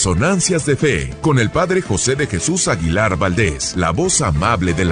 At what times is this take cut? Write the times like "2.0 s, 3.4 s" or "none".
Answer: 1.1 s, 3.6 s